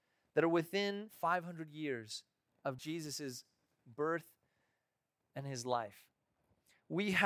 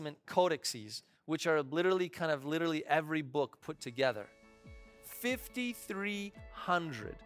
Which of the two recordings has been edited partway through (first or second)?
first